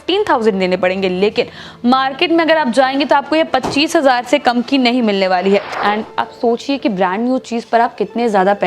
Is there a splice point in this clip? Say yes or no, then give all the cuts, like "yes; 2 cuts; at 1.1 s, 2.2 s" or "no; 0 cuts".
yes; 1 cut; at 5.7 s